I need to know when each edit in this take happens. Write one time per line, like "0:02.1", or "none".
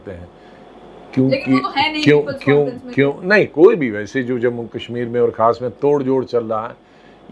none